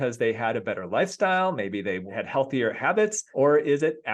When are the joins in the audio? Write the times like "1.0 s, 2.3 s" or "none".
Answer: 2.1 s, 3.2 s